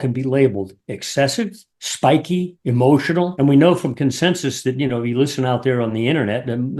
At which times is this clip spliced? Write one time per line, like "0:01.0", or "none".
0:02.8